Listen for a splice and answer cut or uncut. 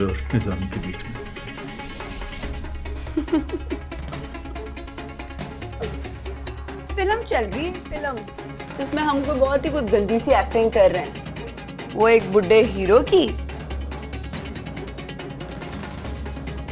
uncut